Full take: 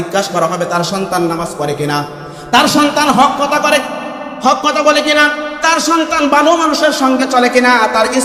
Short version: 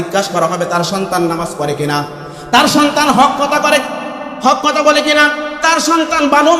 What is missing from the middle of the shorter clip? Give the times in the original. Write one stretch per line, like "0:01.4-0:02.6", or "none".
none